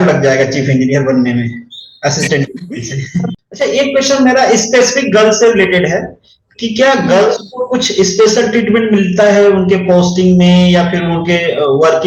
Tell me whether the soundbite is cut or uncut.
cut